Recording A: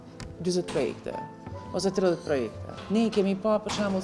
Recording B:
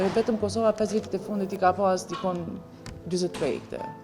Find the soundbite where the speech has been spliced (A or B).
A